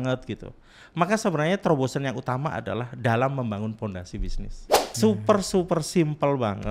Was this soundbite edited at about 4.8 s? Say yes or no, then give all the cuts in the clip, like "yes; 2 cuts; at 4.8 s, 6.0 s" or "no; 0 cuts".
yes; 1 cut; at 4.8 s